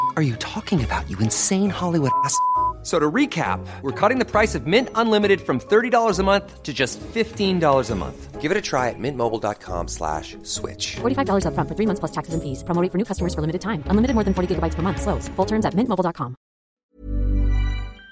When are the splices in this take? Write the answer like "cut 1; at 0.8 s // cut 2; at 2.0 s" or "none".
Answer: cut 1; at 16.7 s